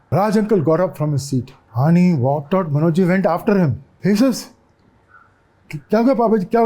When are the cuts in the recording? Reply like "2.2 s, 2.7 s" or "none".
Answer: 1.6 s, 3.9 s

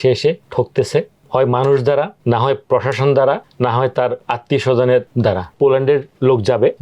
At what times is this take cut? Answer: 4.3 s, 5.3 s

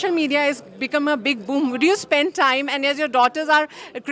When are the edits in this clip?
none

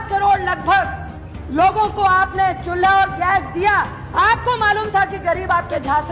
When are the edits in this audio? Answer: none

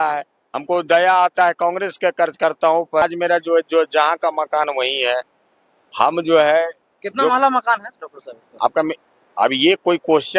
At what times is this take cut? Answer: 3.0 s

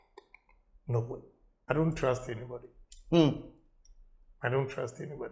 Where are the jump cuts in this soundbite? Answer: 1.6 s

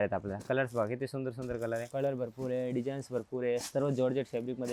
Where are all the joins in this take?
1.9 s

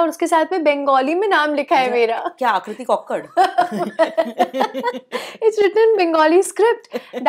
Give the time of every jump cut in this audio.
none

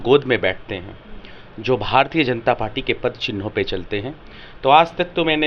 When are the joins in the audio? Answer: none

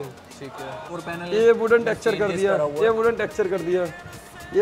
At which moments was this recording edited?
0.9 s

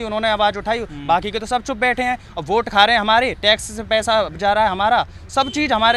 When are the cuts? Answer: none

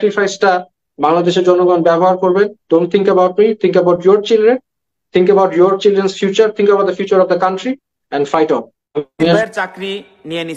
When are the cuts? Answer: 9.2 s

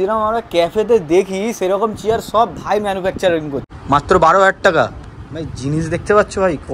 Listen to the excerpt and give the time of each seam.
3.7 s

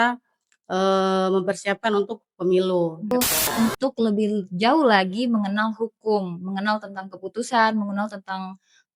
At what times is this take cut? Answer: 3.1 s

